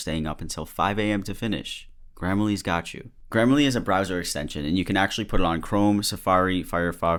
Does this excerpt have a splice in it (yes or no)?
no